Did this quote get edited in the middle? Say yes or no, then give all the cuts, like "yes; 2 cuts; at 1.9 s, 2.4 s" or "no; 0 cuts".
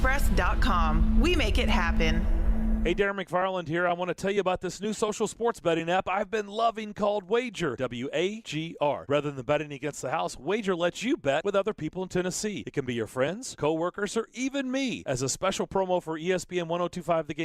yes; 1 cut; at 2.8 s